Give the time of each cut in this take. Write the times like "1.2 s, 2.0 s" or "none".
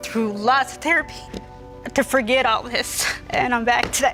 none

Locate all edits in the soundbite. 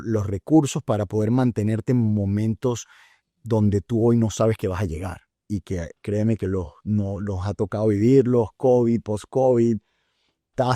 none

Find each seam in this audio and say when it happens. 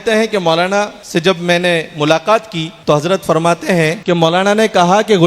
1.0 s, 2.7 s, 4.0 s

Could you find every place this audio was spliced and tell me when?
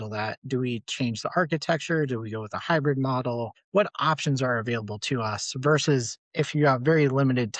3.6 s, 6.2 s

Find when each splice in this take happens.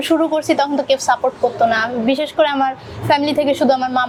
none

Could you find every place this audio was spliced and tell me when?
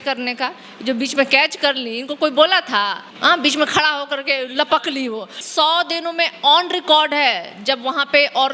3.1 s, 5.4 s

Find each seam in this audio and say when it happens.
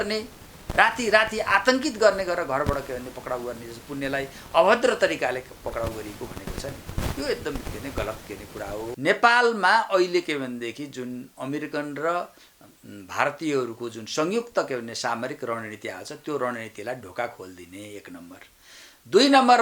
9.0 s

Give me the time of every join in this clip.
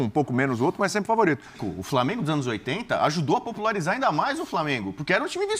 1.6 s

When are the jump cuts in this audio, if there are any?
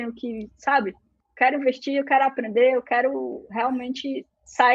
1.2 s

